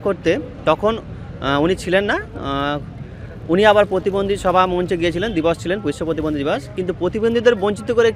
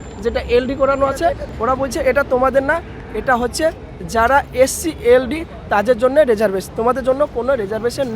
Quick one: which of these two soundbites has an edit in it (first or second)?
second